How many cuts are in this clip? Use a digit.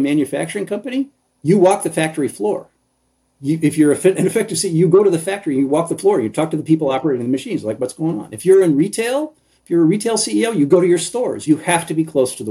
1